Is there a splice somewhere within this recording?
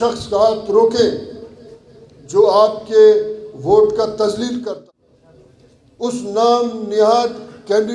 yes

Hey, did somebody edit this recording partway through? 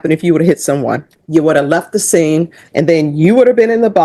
yes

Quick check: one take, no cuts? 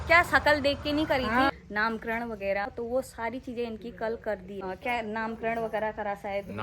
no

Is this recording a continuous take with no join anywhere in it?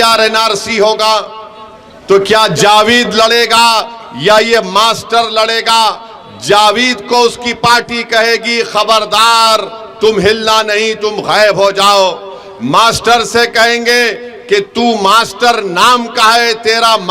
yes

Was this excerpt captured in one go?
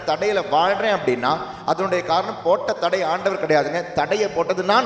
yes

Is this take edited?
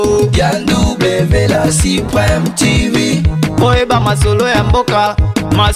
no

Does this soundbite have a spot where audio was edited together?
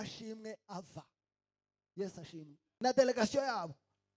yes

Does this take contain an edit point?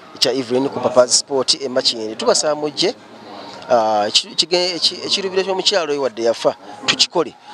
no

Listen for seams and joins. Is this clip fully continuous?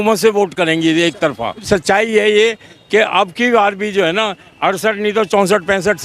no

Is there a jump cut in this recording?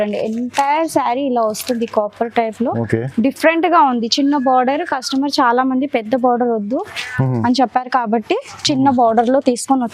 no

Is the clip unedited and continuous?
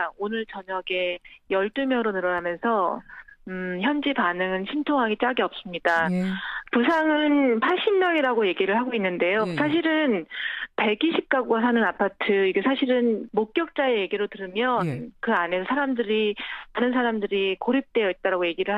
no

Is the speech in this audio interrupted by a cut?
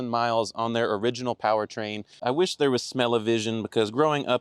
yes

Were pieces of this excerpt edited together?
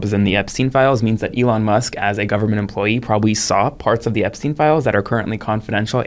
no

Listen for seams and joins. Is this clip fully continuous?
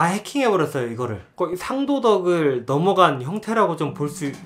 no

